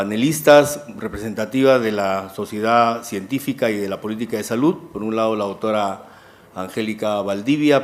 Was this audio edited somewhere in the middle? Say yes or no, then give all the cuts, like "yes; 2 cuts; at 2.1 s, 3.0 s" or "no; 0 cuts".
yes; 1 cut; at 3.1 s